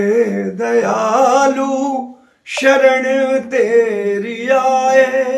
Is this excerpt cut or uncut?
uncut